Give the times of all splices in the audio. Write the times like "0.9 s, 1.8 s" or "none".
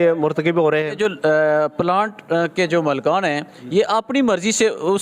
1.0 s

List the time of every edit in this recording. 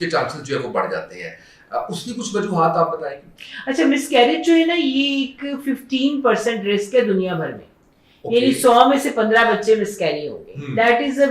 none

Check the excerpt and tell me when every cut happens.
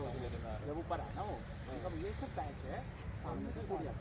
none

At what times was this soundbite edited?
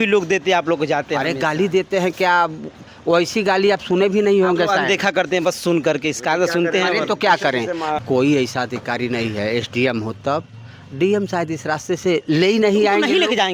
7.9 s

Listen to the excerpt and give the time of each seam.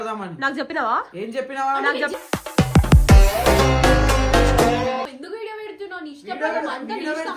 5.0 s

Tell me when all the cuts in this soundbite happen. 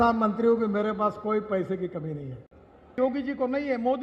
3.0 s

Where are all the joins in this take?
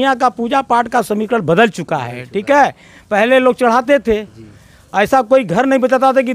none

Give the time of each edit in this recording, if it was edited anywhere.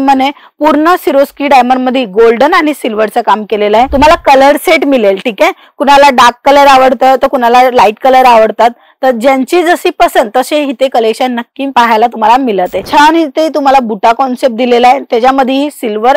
3.9 s, 12.8 s

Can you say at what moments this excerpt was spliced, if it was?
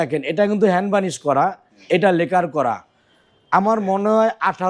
none

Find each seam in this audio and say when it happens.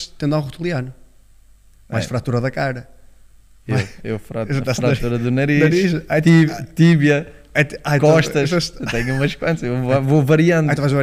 none

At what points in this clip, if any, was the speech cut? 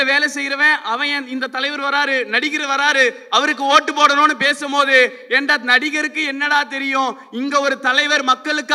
none

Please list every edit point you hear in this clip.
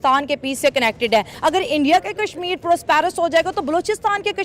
1.3 s

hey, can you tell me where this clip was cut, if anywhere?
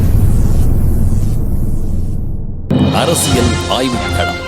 2.7 s

